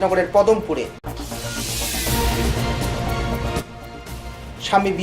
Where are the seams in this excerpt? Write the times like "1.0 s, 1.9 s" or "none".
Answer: 1.1 s, 3.4 s